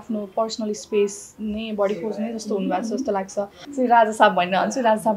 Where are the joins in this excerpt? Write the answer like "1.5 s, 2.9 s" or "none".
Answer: 3.6 s